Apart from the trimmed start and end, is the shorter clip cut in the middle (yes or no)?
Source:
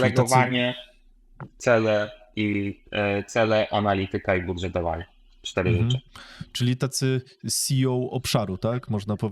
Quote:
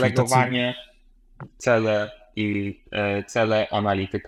no